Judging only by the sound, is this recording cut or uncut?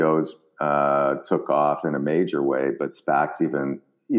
uncut